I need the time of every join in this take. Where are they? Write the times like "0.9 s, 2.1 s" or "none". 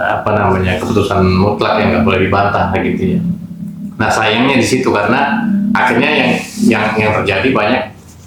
none

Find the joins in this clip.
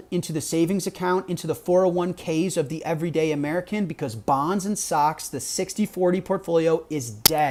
none

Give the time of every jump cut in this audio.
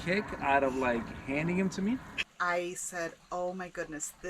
2.2 s

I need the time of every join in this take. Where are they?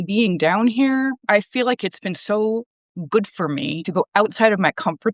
1.2 s, 3.9 s

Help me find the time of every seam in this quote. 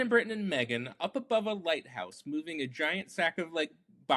none

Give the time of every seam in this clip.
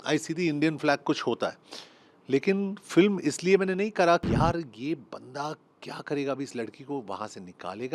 4.2 s

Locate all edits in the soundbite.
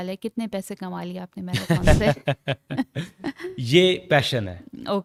none

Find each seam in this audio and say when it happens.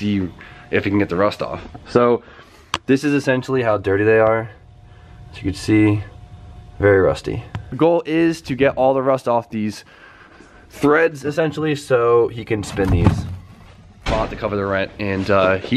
none

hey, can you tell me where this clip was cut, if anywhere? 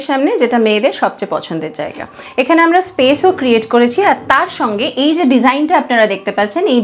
none

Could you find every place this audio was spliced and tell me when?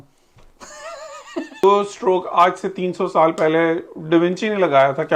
1.6 s

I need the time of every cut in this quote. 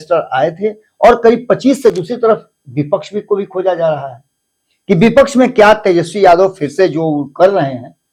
1.9 s

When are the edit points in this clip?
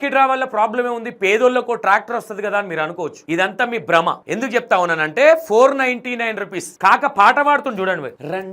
3.2 s, 4.2 s

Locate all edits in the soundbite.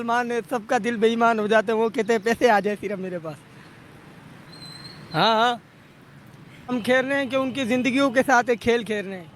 6.7 s

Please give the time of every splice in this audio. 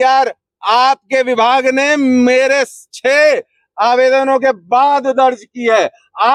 none

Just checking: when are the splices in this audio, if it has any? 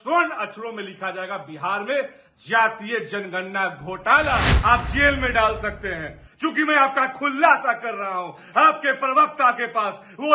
4.5 s

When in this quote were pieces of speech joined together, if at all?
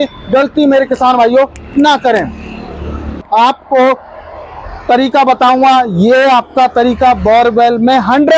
3.2 s

